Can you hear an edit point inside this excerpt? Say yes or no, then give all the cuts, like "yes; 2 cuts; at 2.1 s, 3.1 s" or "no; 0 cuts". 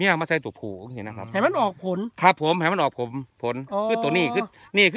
no; 0 cuts